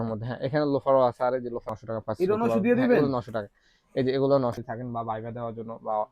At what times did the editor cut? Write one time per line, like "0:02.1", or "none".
0:01.7
0:04.6